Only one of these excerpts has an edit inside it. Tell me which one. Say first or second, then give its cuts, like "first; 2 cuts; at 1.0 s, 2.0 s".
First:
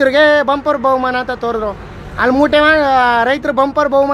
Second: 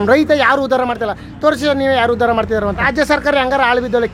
second; 1 cut; at 2.8 s